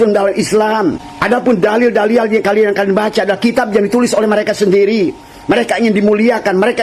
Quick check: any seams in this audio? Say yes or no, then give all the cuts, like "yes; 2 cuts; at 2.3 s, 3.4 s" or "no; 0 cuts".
yes; 2 cuts; at 1.1 s, 2.7 s